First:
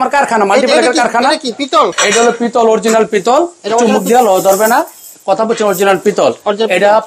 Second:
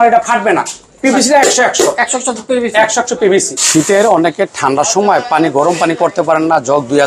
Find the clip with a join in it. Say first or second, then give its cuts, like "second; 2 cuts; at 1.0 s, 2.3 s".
second; 1 cut; at 3.6 s